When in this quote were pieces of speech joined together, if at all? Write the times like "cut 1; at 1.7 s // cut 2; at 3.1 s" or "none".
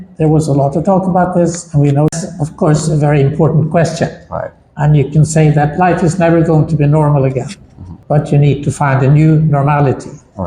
cut 1; at 2.1 s